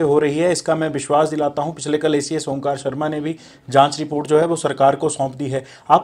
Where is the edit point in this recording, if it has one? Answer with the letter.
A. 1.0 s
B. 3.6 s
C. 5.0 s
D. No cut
D